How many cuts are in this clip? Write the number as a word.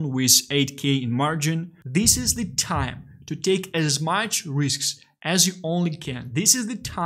one